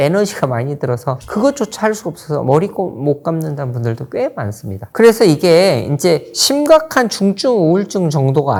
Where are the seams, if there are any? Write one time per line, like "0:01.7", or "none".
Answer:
none